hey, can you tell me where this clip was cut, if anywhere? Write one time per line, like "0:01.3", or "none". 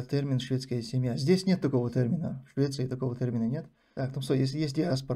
0:03.8